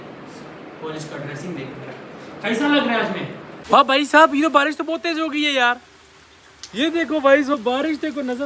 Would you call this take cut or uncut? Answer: cut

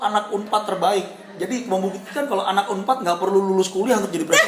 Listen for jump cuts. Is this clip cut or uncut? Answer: uncut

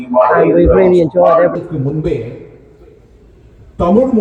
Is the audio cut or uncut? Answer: cut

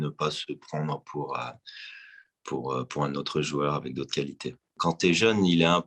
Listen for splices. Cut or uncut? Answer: uncut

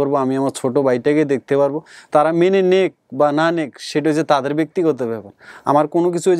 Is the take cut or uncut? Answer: uncut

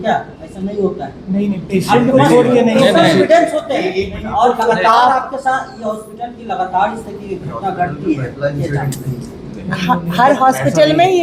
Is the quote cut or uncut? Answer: uncut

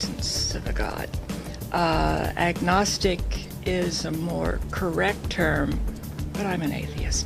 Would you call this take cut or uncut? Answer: cut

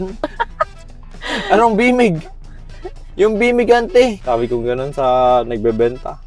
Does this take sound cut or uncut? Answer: uncut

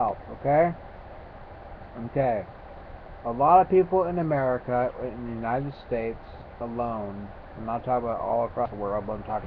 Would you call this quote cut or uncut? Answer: uncut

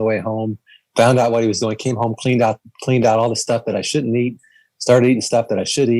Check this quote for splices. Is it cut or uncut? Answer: uncut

